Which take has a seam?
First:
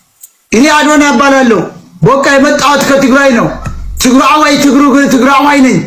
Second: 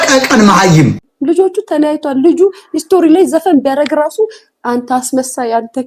second; 1 cut; at 1.1 s

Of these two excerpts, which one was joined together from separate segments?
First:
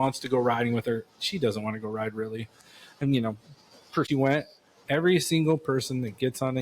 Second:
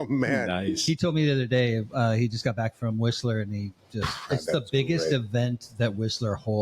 first; 1 cut; at 4.1 s

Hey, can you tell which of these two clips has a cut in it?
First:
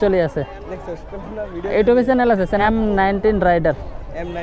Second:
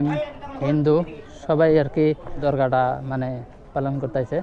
first; 1 cut; at 2.6 s

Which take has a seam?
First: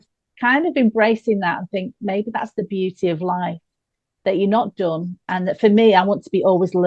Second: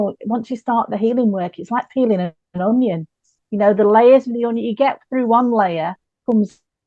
second; 1 cut; at 2.4 s

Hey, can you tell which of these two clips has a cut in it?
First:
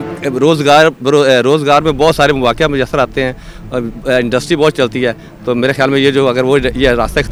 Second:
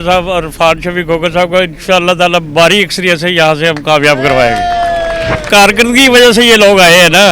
second; 1 cut; at 5.5 s

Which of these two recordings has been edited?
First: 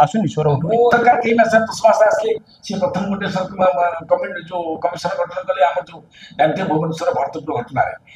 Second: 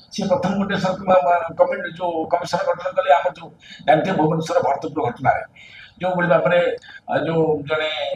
first; 1 cut; at 0.9 s

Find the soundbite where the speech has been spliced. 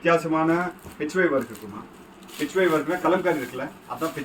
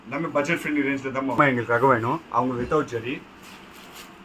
second; 1 cut; at 1.4 s

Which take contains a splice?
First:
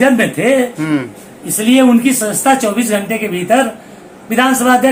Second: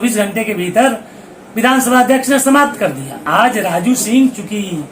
second; 1 cut; at 3.2 s

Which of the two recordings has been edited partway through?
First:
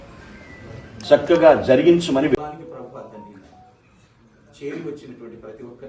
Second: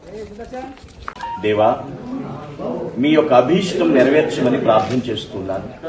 second; 1 cut; at 1.0 s

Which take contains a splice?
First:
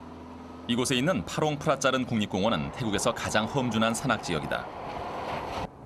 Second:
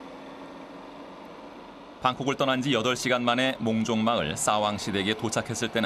second; 1 cut; at 2.8 s

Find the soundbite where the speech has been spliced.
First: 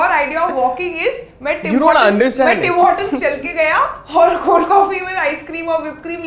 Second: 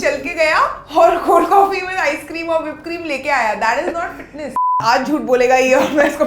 second; 1 cut; at 4.7 s

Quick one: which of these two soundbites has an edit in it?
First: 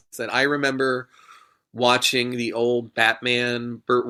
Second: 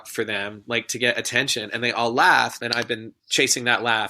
second; 1 cut; at 2.6 s

